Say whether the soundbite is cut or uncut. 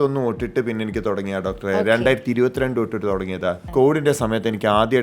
cut